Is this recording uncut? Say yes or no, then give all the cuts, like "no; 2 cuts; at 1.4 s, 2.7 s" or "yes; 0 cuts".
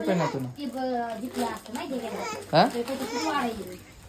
yes; 0 cuts